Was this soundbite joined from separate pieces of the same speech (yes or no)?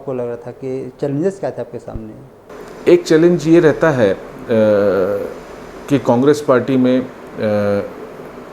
yes